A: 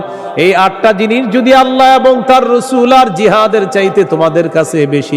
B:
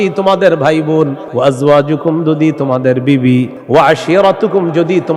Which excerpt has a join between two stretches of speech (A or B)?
B